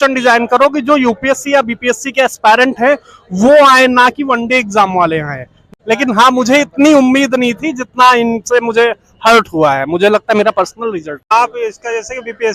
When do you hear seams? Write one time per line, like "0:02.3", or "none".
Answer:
0:05.6
0:11.3